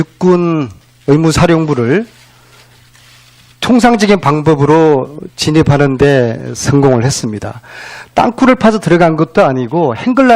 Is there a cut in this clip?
yes; 1 cut; at 9.1 s

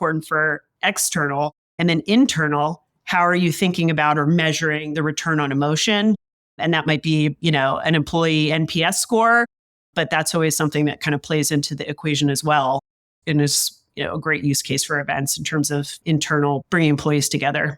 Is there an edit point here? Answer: yes; 1 cut; at 16.6 s

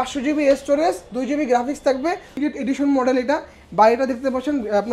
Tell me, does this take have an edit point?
yes; 1 cut; at 2.4 s

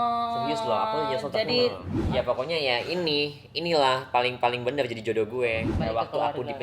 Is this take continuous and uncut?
no; 2 cuts; at 1.9 s, 5.7 s

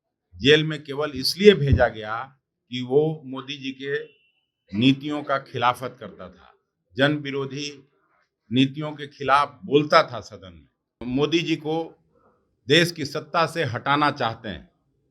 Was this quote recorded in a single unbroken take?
no; 1 cut; at 11.1 s

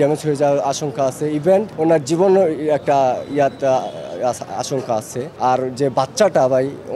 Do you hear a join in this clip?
yes; 2 cuts; at 1.7 s, 5.3 s

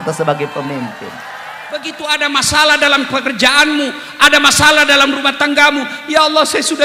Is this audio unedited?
no; 1 cut; at 1.9 s

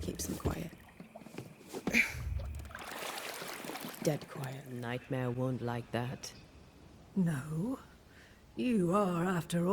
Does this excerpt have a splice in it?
yes; 1 cut; at 4.7 s

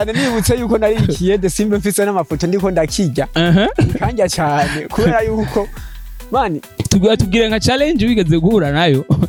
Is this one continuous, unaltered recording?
yes; 0 cuts

